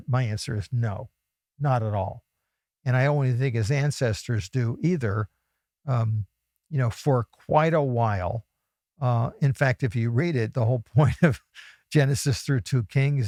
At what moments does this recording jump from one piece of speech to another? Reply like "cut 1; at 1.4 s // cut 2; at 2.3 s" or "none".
none